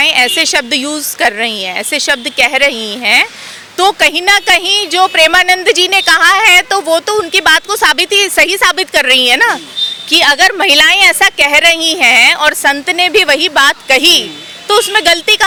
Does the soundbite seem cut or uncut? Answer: uncut